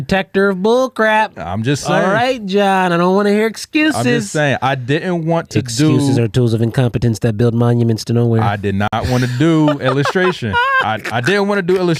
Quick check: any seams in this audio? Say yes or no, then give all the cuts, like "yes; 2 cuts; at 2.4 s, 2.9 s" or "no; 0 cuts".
no; 0 cuts